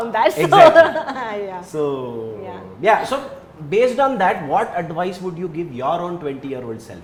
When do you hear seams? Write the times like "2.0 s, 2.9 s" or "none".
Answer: none